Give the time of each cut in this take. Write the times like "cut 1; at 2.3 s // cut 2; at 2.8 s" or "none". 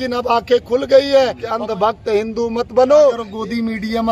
cut 1; at 1.4 s // cut 2; at 3.3 s